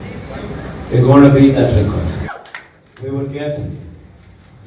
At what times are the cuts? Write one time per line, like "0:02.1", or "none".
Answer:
0:02.3